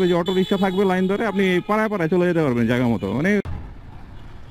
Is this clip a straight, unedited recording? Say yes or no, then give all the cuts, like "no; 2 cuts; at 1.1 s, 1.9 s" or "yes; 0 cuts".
yes; 0 cuts